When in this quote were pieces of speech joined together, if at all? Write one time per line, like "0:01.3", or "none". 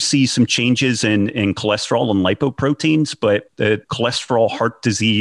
0:03.8